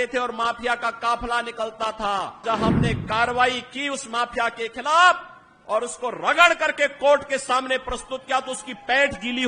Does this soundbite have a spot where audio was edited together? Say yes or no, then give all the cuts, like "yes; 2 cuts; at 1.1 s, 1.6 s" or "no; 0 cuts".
yes; 1 cut; at 2.4 s